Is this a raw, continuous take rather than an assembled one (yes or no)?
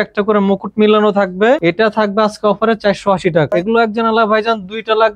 no